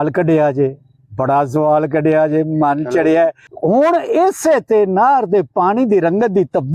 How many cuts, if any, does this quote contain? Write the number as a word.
one